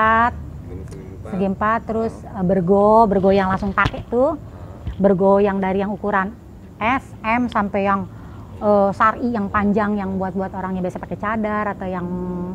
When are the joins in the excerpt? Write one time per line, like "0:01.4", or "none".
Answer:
none